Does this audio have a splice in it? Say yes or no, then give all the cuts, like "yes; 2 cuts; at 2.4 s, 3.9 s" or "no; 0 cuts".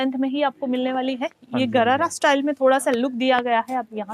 no; 0 cuts